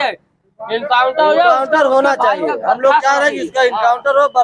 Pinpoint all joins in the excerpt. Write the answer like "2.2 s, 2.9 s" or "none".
none